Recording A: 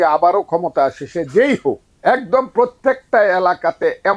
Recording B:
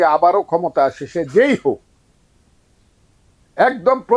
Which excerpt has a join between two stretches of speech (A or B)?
A